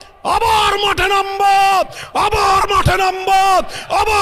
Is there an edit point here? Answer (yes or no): no